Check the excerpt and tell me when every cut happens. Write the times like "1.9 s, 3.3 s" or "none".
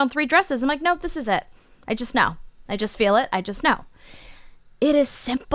none